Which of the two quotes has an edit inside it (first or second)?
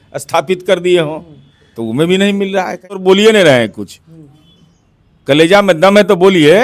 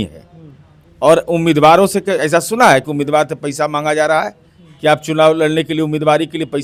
first